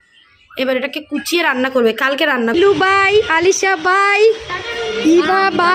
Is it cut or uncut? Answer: cut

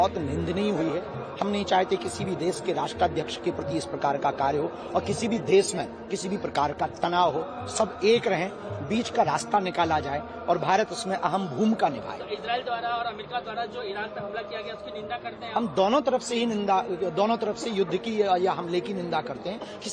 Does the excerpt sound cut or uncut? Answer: uncut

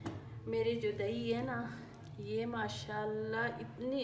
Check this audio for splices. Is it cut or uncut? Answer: uncut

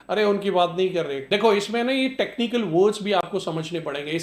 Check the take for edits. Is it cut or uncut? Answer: cut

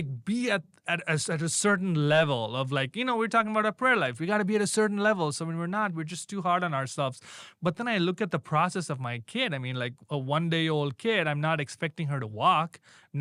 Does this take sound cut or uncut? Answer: uncut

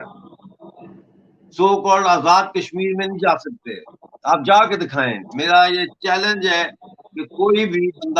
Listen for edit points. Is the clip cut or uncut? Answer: uncut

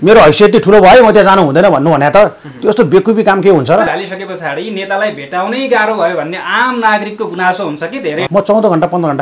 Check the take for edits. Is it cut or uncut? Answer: cut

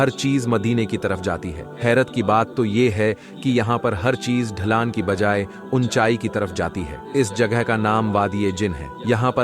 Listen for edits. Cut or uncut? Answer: uncut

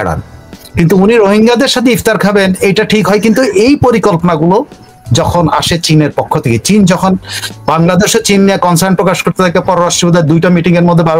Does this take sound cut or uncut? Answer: uncut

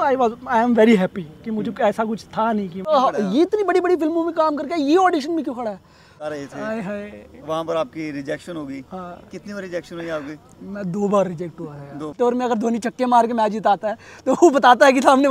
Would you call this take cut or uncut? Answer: cut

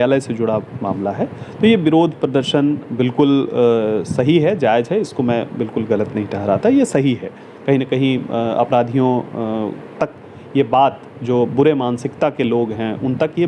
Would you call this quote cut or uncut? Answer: uncut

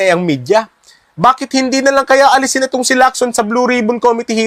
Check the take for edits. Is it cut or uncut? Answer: cut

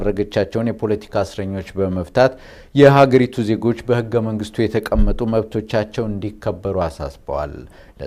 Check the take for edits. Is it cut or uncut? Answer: uncut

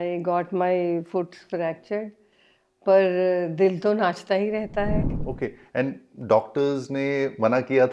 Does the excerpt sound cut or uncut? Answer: cut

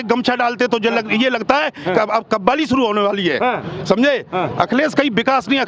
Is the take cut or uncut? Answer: uncut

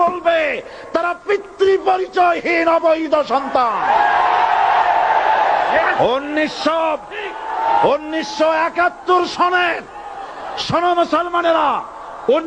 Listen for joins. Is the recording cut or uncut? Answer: uncut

